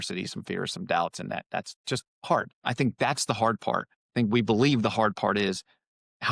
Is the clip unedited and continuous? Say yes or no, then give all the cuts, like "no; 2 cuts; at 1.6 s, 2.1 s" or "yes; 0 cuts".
no; 2 cuts; at 2.5 s, 4.0 s